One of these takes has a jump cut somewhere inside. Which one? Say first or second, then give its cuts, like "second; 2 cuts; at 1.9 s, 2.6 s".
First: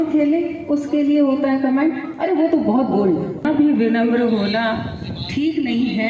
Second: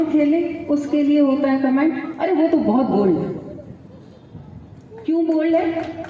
first; 1 cut; at 3.4 s